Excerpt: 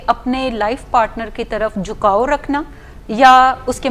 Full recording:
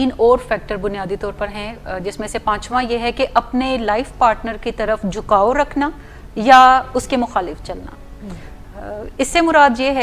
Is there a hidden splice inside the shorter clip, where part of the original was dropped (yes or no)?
no